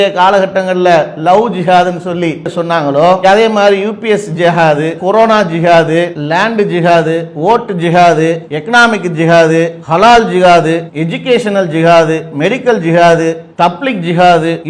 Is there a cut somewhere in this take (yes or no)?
no